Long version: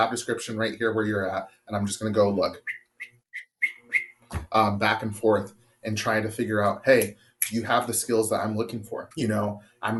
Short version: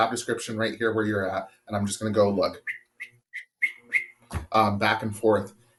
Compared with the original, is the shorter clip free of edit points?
yes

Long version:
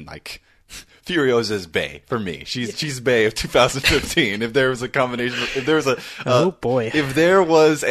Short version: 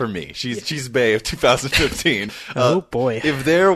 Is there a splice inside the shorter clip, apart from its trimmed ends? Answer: yes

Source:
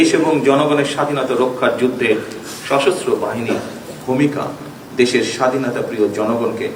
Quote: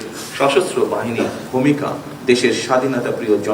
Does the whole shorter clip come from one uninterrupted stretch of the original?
no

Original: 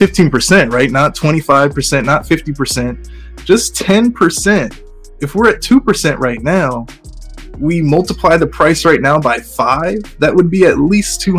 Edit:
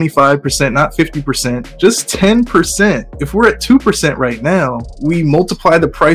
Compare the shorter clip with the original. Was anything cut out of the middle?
yes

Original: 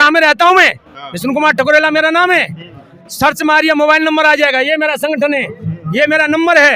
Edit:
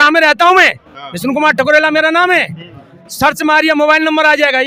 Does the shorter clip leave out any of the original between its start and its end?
no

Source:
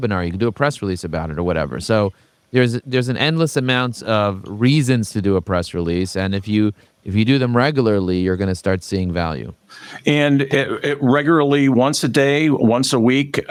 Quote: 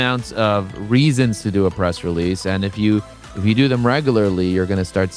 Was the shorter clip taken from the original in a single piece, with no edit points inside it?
yes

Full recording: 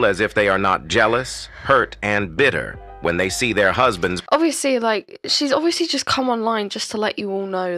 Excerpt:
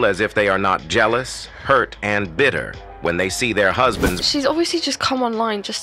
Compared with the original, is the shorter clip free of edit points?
no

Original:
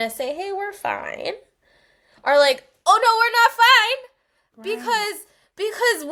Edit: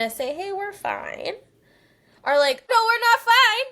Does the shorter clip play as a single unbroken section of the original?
no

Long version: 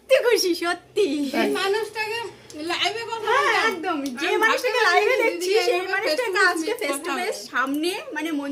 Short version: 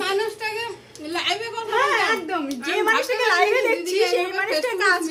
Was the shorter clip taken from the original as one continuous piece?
yes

